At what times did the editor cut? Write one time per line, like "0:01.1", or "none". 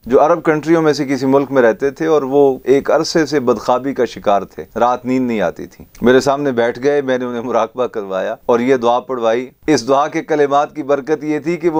0:02.6
0:04.6